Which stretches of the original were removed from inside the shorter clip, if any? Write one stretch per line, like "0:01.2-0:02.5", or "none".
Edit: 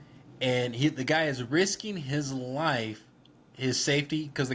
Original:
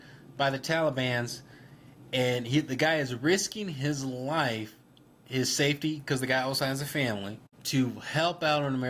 none